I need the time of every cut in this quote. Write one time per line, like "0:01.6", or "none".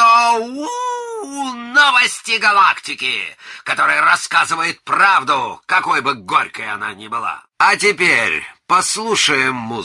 0:07.4